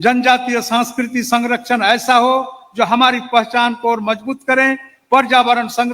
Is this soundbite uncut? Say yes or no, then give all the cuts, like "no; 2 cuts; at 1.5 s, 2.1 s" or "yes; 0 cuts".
yes; 0 cuts